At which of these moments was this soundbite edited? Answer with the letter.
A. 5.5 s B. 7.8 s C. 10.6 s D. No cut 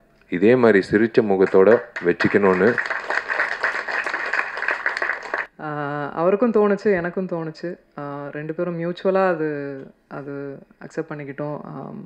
A